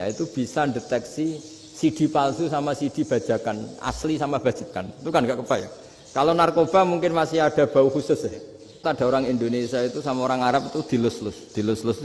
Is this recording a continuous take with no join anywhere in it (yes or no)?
no